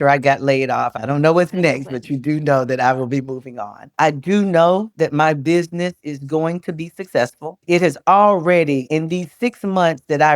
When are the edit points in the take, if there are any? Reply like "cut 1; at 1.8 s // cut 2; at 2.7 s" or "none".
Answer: cut 1; at 0.9 s // cut 2; at 3.9 s

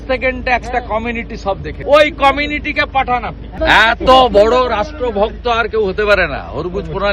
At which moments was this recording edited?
cut 1; at 1.7 s // cut 2; at 3.5 s

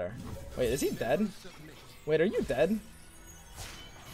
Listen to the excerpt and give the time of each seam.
none

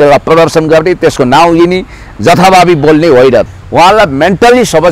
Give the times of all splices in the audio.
cut 1; at 3.5 s

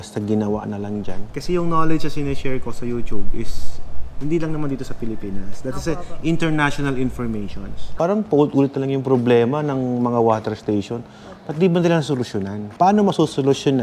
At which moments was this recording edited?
cut 1; at 1.2 s // cut 2; at 7.9 s // cut 3; at 12.7 s

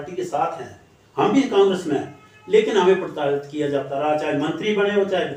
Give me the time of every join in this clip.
none

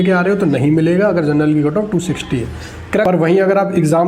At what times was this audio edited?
cut 1; at 3.0 s

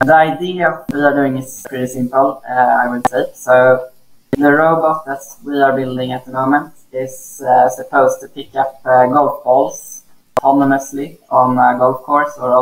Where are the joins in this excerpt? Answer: none

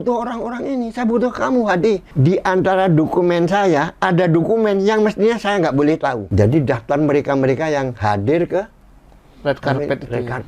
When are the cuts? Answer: cut 1; at 2.1 s // cut 2; at 6.2 s

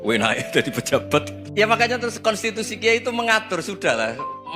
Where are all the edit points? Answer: cut 1; at 1.4 s

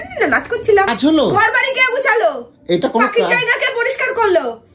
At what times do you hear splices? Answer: cut 1; at 0.9 s

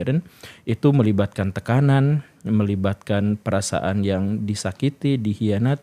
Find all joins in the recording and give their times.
none

